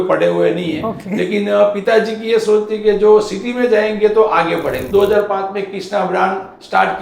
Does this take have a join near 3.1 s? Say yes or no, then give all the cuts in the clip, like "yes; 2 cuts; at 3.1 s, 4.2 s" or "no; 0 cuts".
no; 1 cut; at 4.8 s